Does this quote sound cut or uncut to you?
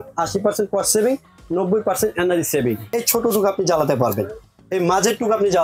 cut